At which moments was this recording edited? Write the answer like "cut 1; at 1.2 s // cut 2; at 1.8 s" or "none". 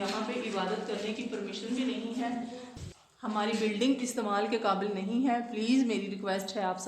cut 1; at 2.7 s